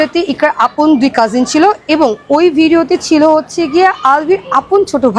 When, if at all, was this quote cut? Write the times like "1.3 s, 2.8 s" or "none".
none